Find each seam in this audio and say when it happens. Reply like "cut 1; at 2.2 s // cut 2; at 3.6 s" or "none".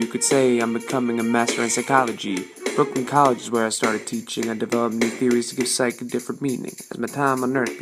none